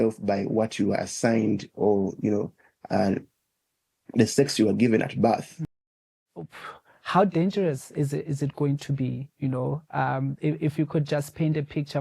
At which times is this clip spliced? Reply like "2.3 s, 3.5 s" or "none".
5.8 s